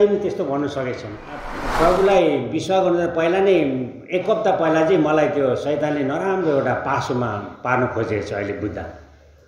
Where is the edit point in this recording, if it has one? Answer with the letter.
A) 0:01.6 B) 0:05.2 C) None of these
A